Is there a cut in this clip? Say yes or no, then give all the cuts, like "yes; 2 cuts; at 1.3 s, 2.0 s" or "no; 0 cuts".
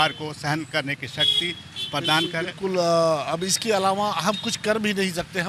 no; 0 cuts